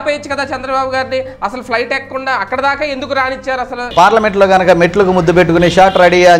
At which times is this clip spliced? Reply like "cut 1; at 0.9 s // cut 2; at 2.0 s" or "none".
cut 1; at 3.9 s